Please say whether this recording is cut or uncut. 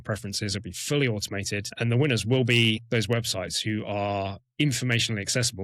cut